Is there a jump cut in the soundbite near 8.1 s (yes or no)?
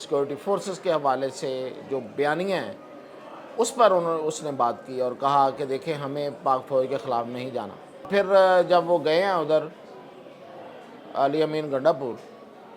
yes